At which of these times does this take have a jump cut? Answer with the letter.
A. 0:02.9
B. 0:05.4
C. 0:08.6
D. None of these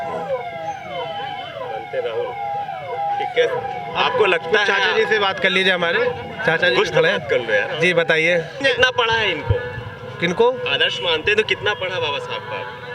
C